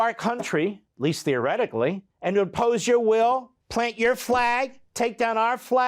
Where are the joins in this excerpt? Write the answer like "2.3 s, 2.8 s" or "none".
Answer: 0.9 s, 2.1 s, 3.6 s